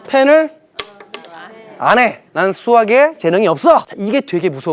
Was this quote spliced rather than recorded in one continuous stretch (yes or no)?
yes